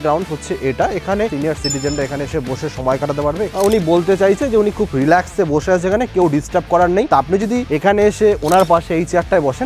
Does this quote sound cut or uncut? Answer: cut